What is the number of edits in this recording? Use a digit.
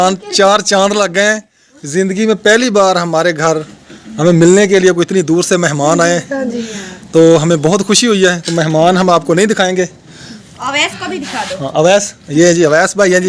2